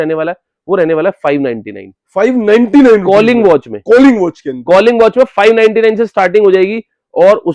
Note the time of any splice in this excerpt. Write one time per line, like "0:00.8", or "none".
none